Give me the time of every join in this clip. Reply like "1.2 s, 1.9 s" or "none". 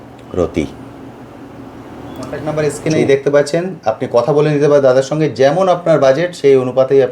2.5 s